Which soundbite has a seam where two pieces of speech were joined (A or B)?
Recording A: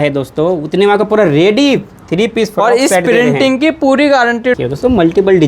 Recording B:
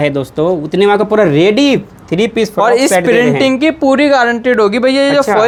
A